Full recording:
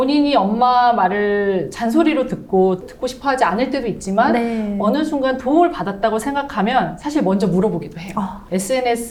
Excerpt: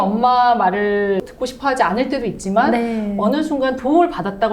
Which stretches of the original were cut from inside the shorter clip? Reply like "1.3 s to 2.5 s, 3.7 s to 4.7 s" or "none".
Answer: 1.7 s to 2.9 s